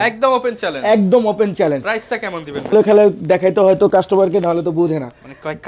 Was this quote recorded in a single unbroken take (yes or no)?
no